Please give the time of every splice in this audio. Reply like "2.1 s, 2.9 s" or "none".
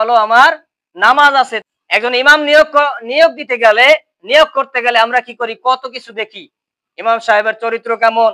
1.6 s

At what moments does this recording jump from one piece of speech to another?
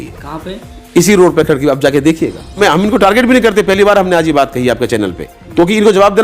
2.6 s

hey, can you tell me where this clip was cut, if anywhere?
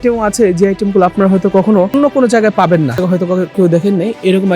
1.9 s, 3.0 s

